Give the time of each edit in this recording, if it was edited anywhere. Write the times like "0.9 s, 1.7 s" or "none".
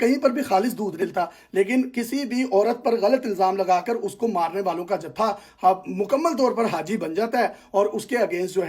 1.0 s